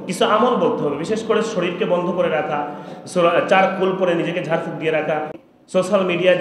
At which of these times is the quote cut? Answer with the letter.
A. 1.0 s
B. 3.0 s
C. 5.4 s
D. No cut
C